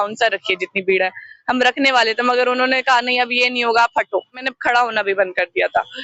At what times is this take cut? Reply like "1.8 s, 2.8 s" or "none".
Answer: 4.5 s